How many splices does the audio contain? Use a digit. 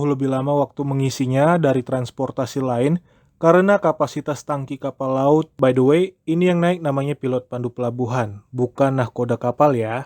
1